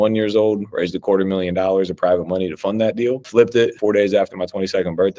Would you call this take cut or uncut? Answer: cut